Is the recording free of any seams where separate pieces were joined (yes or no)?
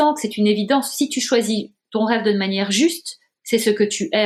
yes